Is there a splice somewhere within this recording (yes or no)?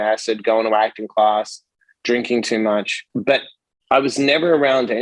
yes